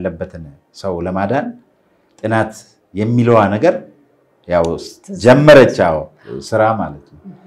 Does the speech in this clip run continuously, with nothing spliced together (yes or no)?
yes